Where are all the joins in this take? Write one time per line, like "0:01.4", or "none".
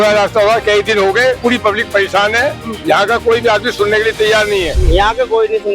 0:01.4
0:04.8